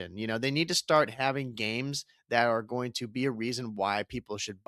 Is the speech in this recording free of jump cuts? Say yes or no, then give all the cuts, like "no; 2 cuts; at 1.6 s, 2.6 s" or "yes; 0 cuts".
yes; 0 cuts